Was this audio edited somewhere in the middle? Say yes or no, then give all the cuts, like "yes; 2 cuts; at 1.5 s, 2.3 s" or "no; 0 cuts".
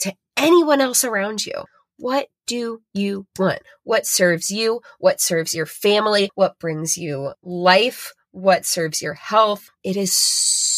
yes; 1 cut; at 9.8 s